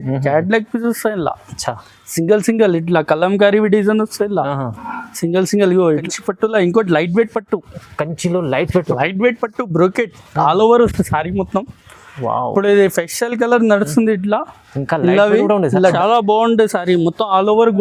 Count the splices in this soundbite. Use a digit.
2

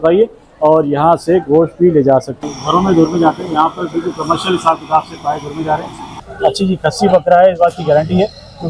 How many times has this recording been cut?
2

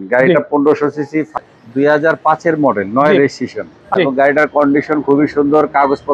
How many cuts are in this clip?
2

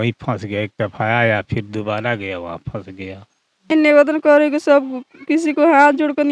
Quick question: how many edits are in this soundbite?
1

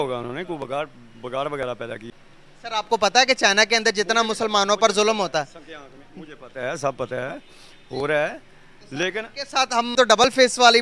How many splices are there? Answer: 2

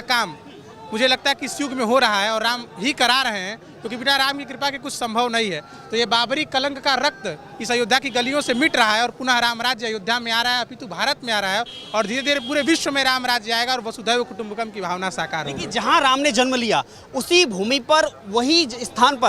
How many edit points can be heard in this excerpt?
0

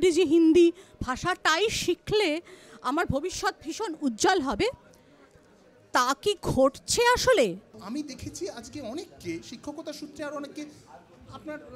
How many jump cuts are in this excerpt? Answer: 1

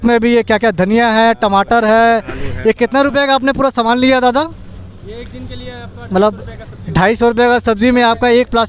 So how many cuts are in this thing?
0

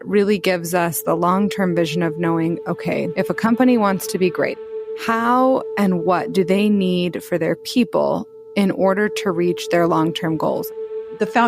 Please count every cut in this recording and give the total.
2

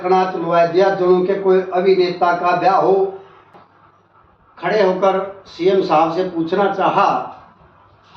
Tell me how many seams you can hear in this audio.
1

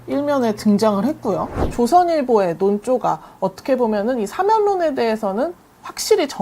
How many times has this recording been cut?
1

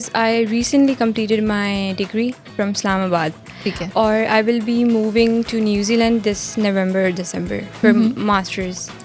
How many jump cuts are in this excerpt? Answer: 0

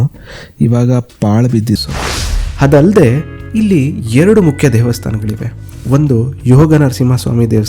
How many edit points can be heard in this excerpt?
1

